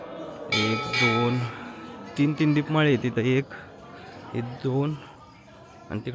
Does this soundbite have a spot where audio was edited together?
no; 0 cuts

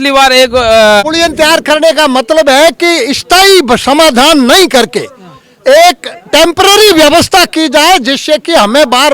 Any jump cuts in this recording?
yes; 1 cut; at 1.0 s

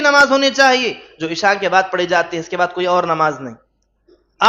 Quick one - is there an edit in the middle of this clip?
no; 0 cuts

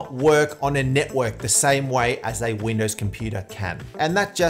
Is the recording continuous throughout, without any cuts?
yes; 0 cuts

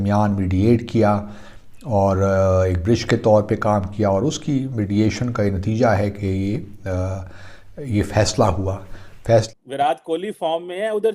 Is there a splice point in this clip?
yes; 1 cut; at 9.5 s

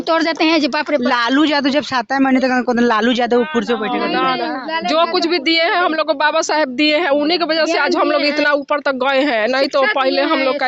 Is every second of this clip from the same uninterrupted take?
yes; 0 cuts

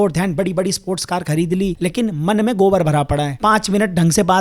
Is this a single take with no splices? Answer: no; 1 cut; at 1.8 s

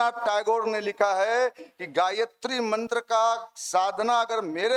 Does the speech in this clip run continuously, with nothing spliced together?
yes; 0 cuts

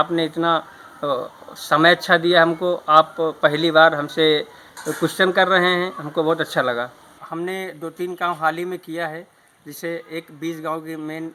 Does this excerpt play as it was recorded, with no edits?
no; 1 cut; at 7.2 s

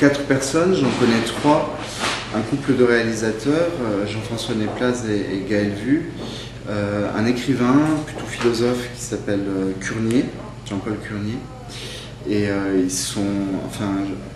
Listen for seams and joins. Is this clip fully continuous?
no; 1 cut; at 8.5 s

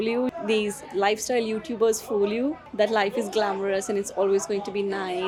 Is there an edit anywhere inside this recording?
no; 0 cuts

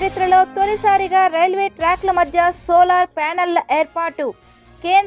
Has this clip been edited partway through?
no; 0 cuts

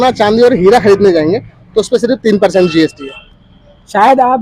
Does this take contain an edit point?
no; 0 cuts

